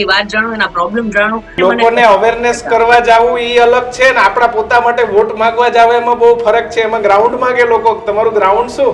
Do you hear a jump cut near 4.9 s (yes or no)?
no